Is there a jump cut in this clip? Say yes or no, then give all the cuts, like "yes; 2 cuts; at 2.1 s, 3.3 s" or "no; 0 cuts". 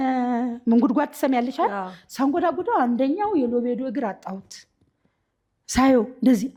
no; 0 cuts